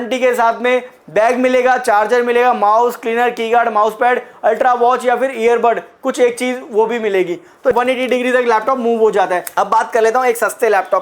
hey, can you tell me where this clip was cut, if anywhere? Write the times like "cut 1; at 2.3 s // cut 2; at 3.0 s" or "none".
cut 1; at 7.7 s // cut 2; at 9.5 s